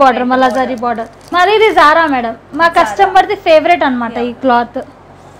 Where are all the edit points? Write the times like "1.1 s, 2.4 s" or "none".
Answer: 1.1 s